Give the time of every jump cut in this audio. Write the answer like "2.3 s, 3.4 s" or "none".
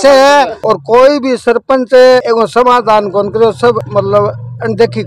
none